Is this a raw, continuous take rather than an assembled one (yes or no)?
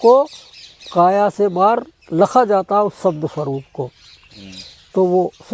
yes